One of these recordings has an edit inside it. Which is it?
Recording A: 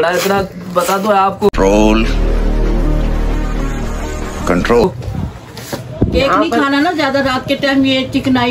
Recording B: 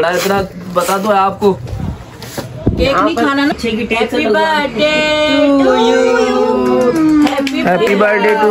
B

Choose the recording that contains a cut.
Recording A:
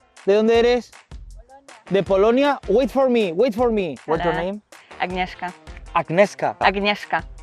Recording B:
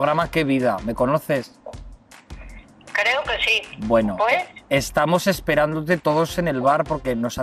A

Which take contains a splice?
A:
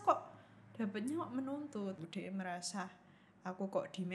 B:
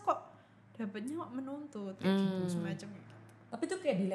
A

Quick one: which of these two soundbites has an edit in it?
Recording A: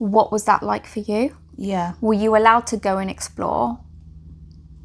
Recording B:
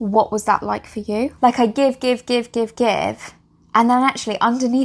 B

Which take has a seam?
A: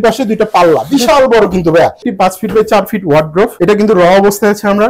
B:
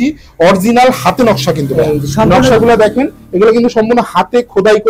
A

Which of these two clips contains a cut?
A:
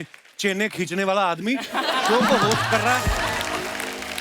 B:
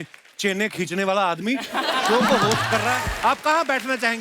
B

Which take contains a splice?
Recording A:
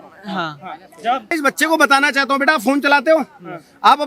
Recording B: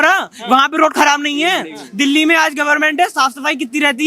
A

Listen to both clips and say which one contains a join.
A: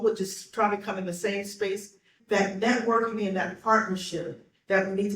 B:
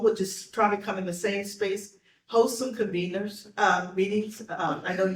A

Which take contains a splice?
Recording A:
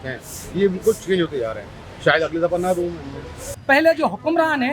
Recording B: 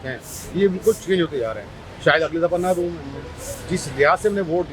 A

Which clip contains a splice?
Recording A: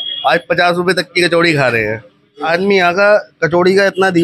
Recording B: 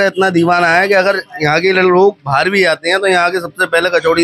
A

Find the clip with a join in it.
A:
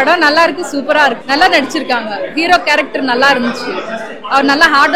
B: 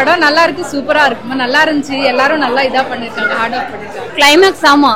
B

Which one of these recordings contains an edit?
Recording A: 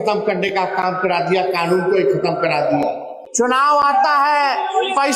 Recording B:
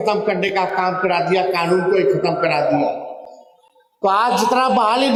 A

